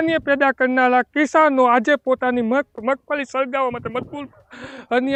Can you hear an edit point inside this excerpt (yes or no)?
no